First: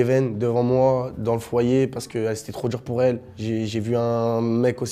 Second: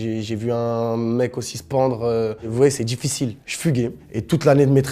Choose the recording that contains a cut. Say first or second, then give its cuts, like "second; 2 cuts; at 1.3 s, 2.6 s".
second; 2 cuts; at 2.5 s, 4.0 s